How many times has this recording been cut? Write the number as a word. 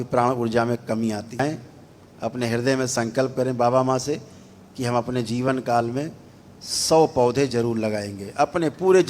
one